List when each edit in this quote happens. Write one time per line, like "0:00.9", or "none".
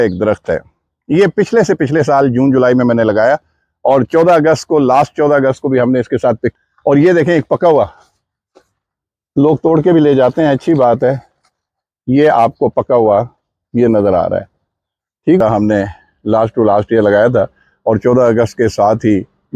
0:06.5
0:15.4